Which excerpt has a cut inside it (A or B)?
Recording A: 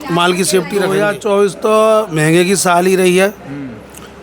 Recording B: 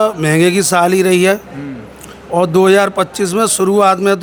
A